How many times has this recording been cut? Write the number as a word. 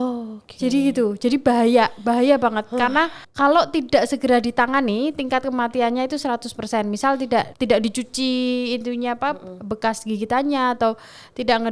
two